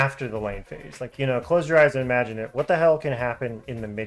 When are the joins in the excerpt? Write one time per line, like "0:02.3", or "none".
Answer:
0:01.1